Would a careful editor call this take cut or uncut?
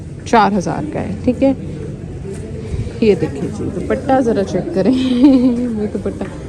uncut